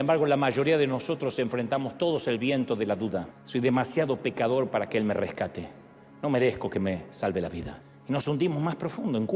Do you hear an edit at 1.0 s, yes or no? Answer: no